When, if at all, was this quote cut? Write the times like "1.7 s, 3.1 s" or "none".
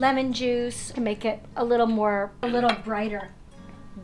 0.9 s, 2.4 s